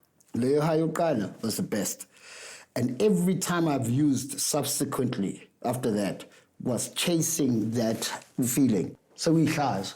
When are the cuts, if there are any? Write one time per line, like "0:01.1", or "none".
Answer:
0:09.0